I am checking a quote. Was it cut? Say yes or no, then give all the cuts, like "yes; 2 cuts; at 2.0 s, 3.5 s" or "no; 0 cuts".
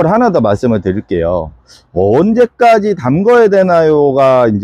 no; 0 cuts